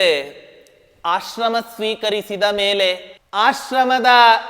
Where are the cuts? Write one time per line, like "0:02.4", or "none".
0:03.1